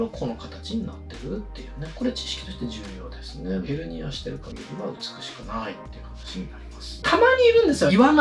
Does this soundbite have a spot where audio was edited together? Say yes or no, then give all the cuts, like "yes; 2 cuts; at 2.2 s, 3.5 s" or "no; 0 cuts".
yes; 1 cut; at 7.0 s